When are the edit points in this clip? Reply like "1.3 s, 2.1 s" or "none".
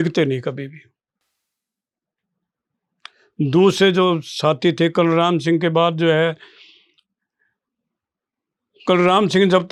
none